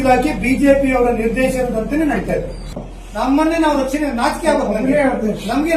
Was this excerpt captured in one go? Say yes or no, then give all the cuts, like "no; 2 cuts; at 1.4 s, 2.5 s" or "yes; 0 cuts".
no; 1 cut; at 2.7 s